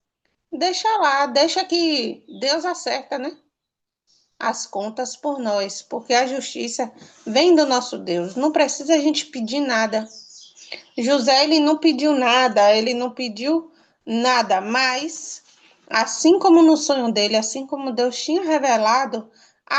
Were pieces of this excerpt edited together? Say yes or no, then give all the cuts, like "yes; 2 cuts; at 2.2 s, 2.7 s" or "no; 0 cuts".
no; 0 cuts